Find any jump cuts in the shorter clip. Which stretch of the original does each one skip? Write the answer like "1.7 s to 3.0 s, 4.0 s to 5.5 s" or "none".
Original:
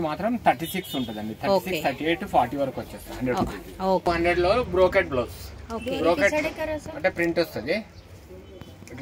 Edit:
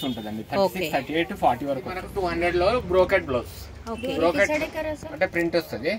3.1 s to 4.0 s